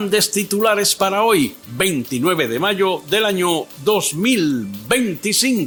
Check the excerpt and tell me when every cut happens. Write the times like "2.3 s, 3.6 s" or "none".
none